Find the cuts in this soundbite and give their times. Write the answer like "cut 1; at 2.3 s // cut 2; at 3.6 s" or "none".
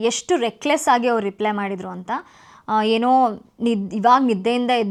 none